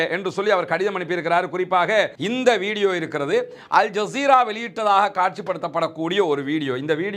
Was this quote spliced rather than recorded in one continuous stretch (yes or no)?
yes